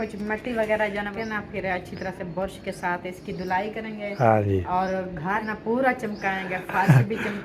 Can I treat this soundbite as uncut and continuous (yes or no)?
no